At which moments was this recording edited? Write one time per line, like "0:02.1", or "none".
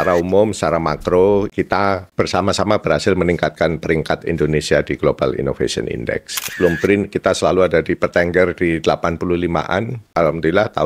0:01.5
0:06.5
0:10.0